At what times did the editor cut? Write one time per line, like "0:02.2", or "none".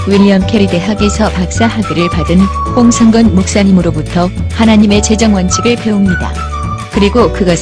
none